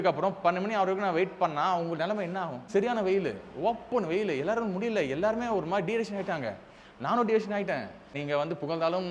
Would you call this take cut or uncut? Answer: cut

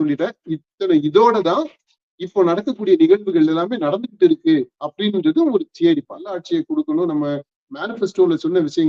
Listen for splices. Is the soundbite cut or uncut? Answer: cut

